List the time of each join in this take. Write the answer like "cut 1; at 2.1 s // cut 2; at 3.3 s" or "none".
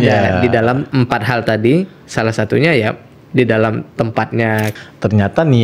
cut 1; at 0.9 s // cut 2; at 4.7 s